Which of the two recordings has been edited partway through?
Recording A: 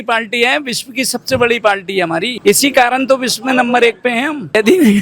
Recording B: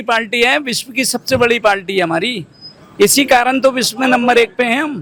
A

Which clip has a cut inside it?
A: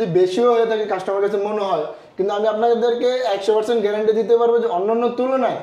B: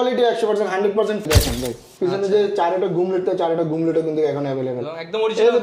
B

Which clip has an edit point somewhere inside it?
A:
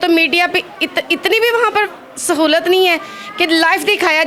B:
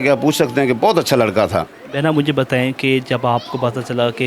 B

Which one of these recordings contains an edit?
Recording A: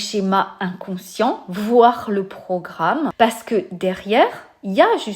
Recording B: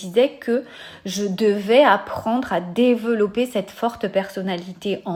A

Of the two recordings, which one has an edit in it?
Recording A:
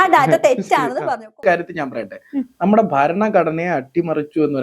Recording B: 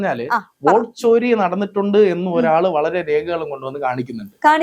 A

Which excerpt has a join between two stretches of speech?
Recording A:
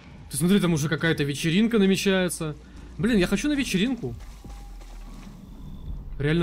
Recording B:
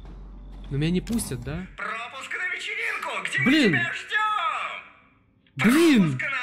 B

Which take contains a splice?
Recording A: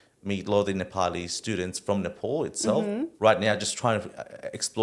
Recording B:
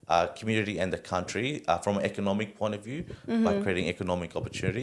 A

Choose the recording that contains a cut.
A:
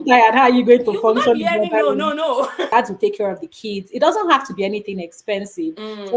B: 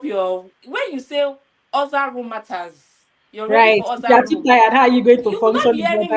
A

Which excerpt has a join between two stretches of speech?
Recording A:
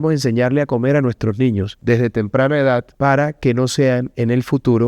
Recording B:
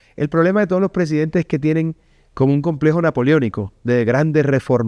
A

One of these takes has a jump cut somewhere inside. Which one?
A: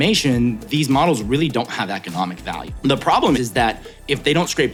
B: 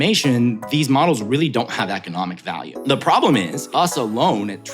B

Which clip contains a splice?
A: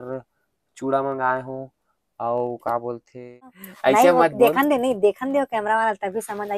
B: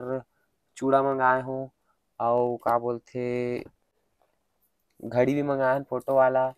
A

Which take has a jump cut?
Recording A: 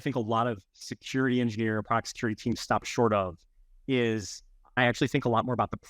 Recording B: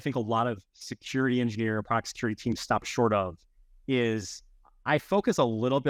A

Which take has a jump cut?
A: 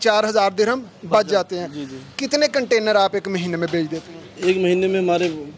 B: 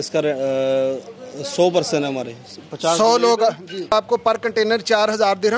B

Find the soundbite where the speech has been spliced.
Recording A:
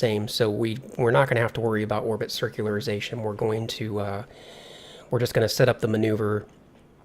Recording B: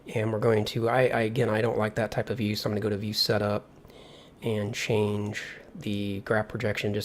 A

